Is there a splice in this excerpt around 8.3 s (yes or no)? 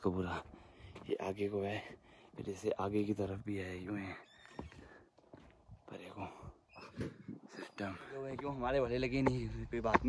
yes